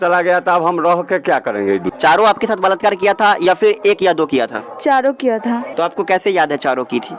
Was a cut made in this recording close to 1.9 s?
yes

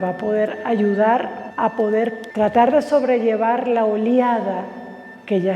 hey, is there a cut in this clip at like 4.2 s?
no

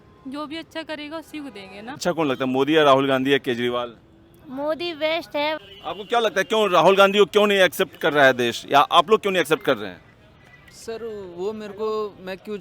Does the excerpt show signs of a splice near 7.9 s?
no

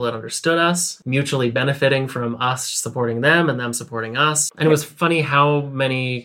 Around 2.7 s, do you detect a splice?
no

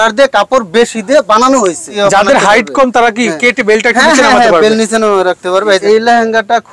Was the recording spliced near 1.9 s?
yes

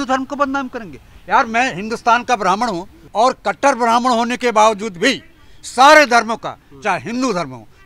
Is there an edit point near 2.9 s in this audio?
yes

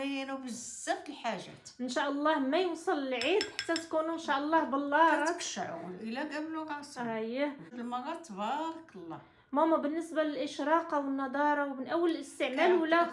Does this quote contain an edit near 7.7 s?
yes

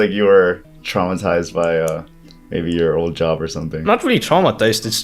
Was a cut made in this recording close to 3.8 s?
yes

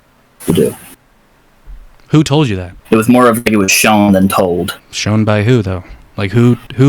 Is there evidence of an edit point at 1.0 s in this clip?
no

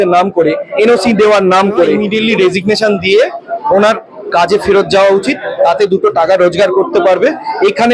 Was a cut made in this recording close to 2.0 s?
yes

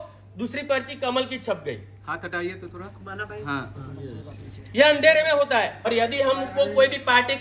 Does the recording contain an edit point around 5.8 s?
yes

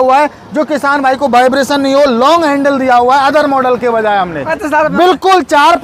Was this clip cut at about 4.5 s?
yes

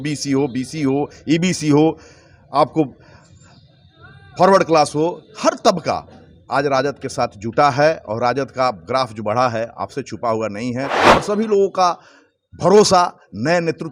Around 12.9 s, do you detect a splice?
no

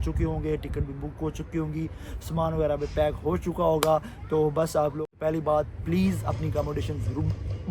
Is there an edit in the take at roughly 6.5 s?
no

